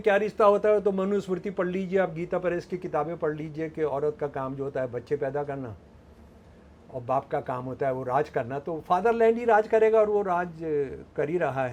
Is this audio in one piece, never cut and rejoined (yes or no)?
yes